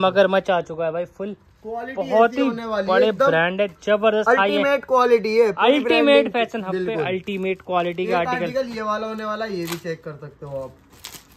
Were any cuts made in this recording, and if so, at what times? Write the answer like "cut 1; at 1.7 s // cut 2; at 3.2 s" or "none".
none